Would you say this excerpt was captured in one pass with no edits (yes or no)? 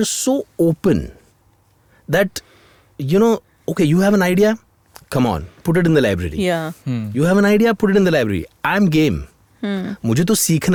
yes